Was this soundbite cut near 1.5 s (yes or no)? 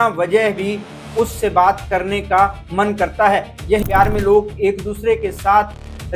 no